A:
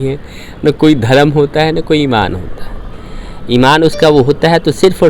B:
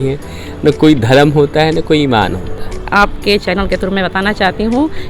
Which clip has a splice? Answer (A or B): B